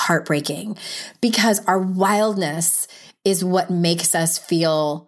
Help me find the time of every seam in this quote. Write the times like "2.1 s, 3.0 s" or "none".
none